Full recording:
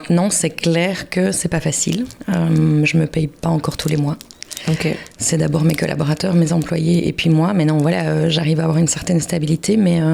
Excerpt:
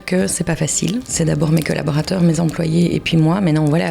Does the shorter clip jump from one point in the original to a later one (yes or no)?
yes